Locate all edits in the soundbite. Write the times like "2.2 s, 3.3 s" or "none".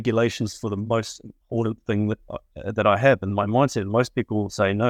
none

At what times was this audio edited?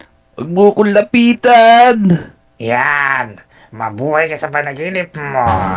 2.4 s

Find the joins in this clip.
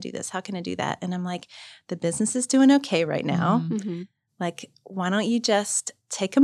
none

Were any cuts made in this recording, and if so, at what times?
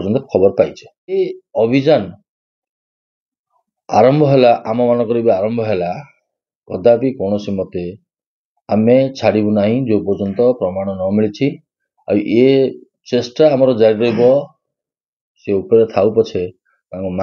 1.2 s

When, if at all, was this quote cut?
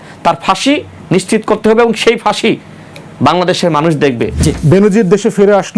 4.4 s

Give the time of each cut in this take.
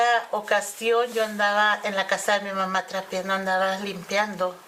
none

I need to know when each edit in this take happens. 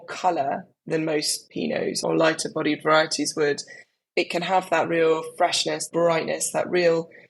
1.4 s, 5.9 s

